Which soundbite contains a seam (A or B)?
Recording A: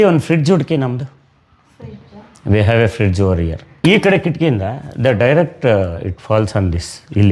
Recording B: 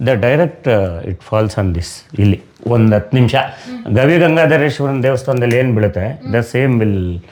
A